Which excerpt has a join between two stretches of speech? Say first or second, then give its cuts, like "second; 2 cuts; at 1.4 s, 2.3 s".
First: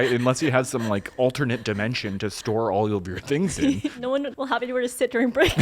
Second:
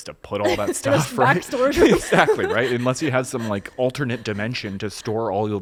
first; 1 cut; at 4.1 s